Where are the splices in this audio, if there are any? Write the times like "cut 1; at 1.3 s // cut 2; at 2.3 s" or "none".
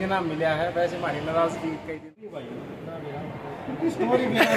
cut 1; at 2.3 s